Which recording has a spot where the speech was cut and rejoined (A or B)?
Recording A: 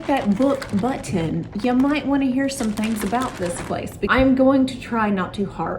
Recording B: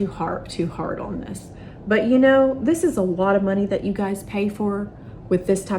A